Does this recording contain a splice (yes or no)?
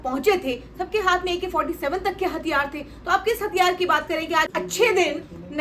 yes